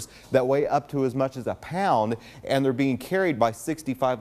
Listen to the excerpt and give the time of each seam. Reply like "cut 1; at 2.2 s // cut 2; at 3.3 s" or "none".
none